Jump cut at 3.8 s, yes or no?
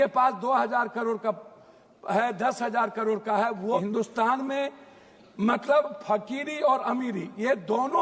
yes